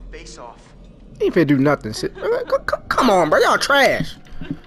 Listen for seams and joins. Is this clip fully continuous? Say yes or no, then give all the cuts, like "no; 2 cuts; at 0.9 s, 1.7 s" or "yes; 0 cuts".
yes; 0 cuts